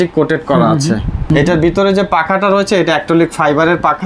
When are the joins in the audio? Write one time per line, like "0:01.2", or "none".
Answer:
0:01.3